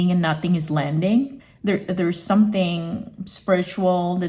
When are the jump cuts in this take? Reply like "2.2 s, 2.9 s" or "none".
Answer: 1.4 s